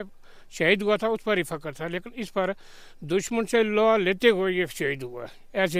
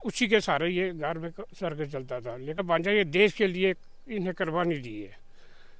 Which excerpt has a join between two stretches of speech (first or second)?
second